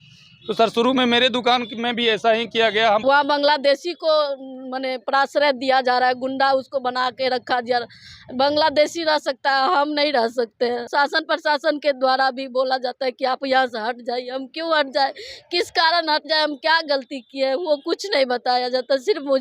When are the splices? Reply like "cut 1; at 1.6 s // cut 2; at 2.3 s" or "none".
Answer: cut 1; at 3.0 s // cut 2; at 10.8 s